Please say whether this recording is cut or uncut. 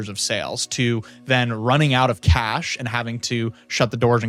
uncut